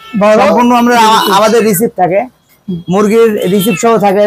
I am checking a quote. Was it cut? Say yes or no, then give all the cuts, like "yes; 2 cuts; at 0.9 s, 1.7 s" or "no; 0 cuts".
no; 0 cuts